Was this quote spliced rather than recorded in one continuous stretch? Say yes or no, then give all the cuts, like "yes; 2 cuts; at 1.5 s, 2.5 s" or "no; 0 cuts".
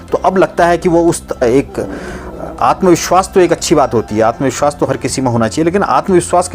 yes; 1 cut; at 1.4 s